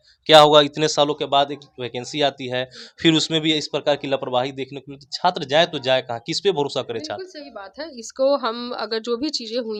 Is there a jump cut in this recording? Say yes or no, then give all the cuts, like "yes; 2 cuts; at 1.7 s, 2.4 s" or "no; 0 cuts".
no; 0 cuts